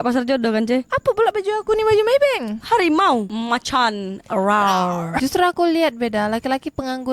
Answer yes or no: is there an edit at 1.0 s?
no